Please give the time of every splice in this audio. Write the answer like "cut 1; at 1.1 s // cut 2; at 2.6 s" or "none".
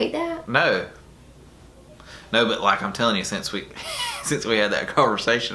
none